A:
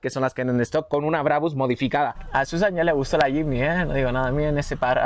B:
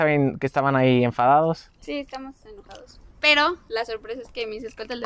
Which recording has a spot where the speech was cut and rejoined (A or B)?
A